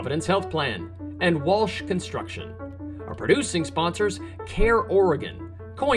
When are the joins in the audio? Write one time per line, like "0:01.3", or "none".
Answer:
0:02.7